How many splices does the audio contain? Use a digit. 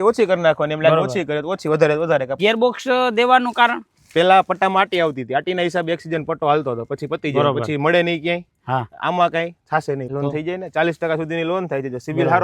2